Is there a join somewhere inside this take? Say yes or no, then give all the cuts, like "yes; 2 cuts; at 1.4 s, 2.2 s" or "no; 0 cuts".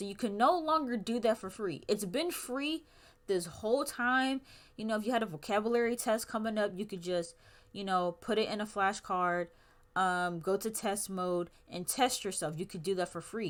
no; 0 cuts